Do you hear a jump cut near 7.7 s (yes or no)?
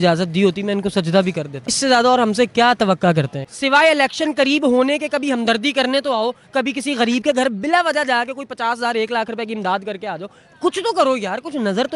no